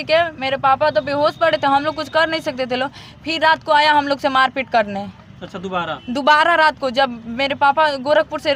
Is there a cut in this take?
no; 0 cuts

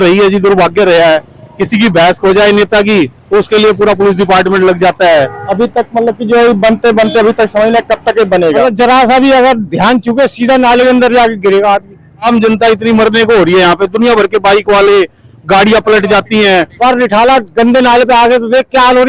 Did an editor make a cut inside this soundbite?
yes; 4 cuts; at 5.4 s, 8.6 s, 12.3 s, 16.7 s

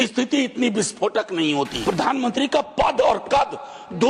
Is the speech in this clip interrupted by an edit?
yes; 1 cut; at 1.8 s

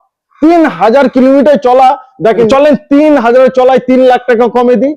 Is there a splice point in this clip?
yes; 1 cut; at 2.5 s

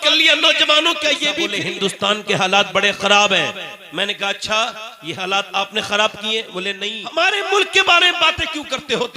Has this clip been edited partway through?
yes; 2 cuts; at 1.5 s, 6.8 s

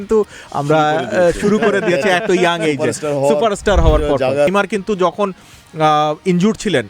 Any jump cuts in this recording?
yes; 1 cut; at 4.5 s

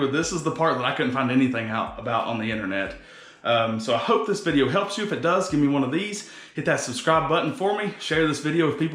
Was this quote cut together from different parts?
no; 0 cuts

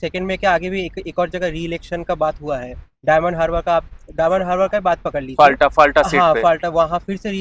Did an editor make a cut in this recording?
no; 0 cuts

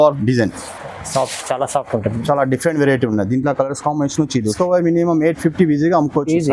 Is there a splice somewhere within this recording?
yes; 1 cut; at 4.5 s

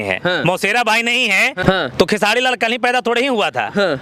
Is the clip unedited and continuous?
no; 1 cut; at 1.6 s

